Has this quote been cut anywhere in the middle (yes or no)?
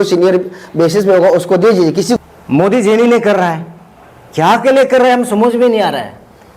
yes